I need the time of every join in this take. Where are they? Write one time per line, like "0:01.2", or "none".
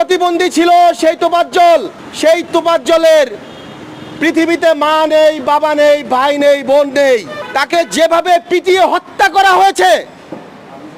0:02.0
0:07.4